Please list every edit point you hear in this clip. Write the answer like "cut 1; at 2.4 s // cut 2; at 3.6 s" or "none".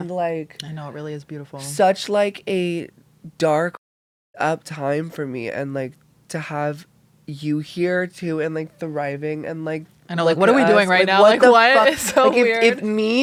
none